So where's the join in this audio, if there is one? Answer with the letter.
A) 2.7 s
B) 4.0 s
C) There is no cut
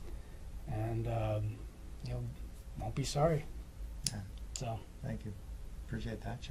C